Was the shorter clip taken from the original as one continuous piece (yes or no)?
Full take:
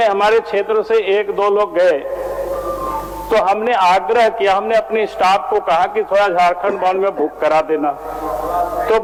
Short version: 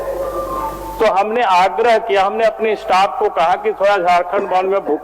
yes